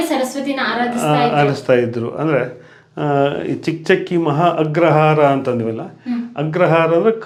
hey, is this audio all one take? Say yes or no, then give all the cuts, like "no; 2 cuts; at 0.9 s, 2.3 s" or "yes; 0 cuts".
yes; 0 cuts